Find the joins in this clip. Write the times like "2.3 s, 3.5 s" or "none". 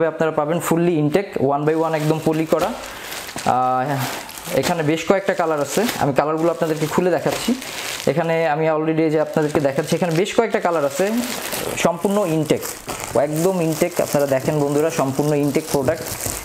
none